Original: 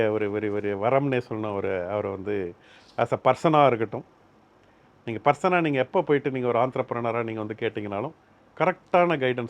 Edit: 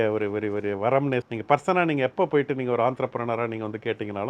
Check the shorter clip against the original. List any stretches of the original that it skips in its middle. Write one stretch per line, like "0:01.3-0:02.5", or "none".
0:01.3-0:05.0